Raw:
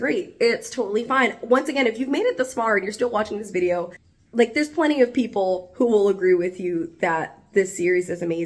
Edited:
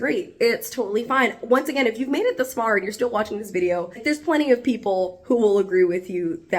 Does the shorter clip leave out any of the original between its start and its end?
yes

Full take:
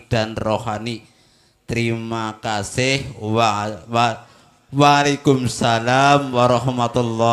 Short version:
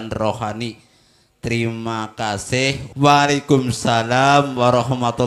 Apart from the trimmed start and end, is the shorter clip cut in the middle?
yes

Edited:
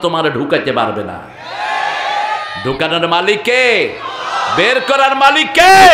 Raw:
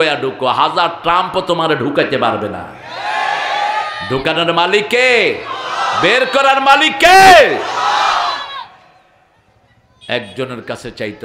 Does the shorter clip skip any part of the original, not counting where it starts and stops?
no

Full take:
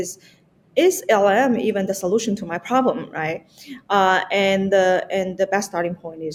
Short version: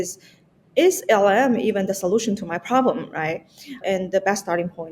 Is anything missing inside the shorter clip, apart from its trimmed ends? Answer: yes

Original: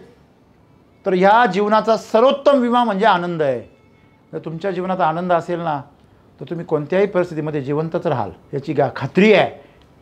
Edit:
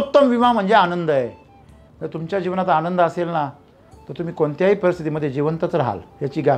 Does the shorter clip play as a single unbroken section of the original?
yes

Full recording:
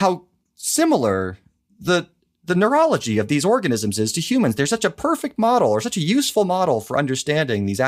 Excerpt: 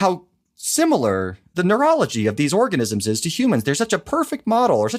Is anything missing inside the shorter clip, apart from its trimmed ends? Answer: yes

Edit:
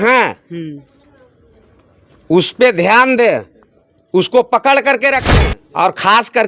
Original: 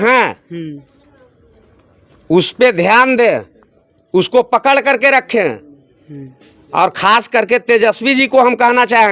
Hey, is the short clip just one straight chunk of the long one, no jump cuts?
no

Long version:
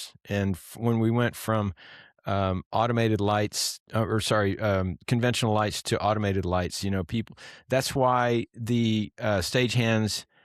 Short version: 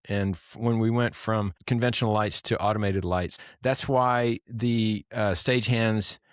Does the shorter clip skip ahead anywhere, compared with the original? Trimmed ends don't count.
yes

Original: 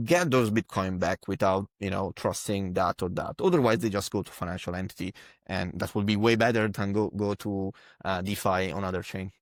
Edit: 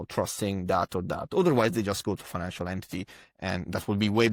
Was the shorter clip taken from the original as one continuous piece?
yes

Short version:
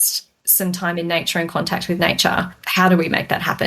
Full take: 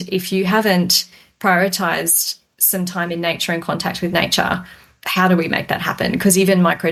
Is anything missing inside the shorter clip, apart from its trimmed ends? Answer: yes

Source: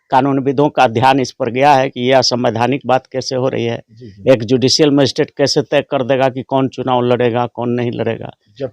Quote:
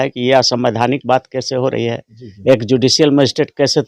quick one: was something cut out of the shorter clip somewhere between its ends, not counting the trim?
no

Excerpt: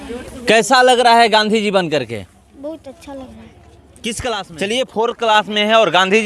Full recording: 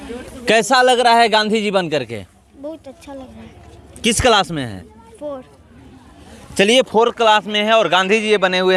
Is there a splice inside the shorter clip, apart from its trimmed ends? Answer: yes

